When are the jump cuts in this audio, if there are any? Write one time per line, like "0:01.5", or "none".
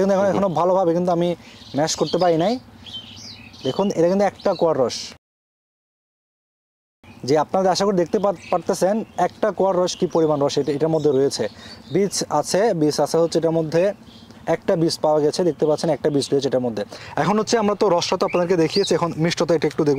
none